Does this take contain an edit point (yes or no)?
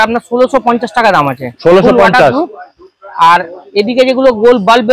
no